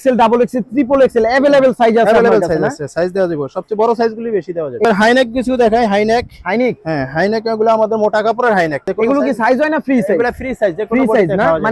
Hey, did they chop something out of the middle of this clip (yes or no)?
yes